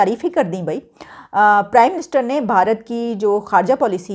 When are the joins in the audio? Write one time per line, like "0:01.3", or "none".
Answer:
none

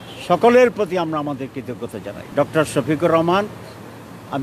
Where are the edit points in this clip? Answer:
0:02.1

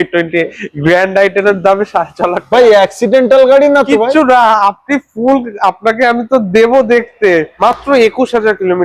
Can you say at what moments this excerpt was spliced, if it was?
0:07.5

